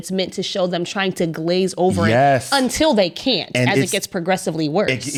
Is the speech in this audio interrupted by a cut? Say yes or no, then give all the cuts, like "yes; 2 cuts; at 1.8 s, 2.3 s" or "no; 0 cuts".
no; 0 cuts